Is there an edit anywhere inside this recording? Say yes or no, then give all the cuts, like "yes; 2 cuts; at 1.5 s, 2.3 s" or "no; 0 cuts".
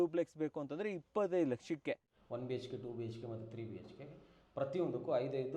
yes; 1 cut; at 2.2 s